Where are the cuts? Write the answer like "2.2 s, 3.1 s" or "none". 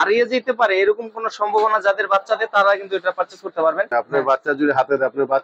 3.9 s